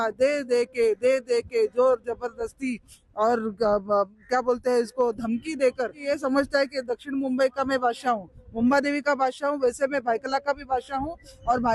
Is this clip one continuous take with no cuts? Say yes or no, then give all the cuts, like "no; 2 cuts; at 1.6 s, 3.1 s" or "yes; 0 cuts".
no; 1 cut; at 6.1 s